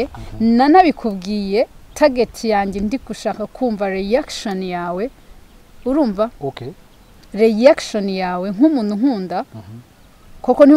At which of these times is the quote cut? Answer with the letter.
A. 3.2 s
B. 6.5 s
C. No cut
C